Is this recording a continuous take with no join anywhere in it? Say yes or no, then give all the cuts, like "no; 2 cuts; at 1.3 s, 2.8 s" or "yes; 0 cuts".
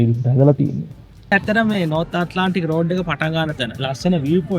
no; 1 cut; at 1.3 s